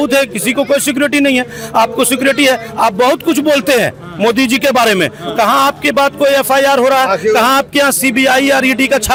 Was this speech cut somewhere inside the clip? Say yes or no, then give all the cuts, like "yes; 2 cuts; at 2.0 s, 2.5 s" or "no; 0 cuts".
no; 0 cuts